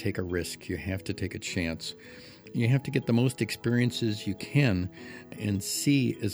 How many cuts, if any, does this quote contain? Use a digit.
2